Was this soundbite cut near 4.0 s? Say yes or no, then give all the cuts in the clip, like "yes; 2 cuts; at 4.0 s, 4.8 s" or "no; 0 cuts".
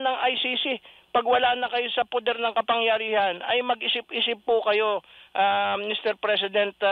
no; 0 cuts